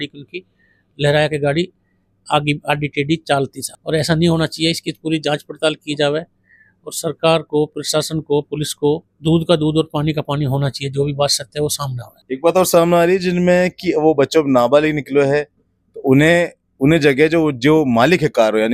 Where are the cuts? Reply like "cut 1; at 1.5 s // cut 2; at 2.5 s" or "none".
none